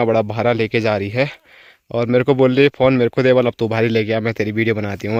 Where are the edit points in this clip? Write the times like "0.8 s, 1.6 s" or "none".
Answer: none